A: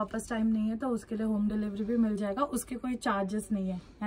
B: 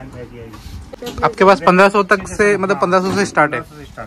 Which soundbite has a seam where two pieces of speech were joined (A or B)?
B